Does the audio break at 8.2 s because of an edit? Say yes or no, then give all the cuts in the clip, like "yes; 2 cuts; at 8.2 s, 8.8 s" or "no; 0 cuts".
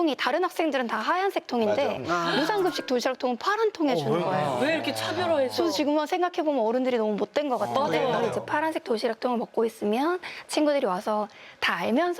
yes; 1 cut; at 8.2 s